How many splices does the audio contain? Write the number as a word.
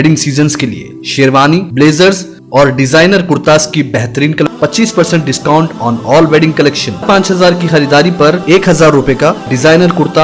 two